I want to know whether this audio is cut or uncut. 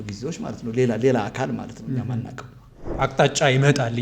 cut